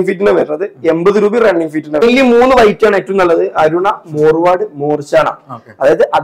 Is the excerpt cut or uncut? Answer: cut